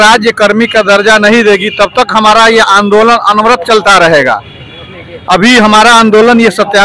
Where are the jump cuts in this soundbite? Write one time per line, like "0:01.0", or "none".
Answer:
none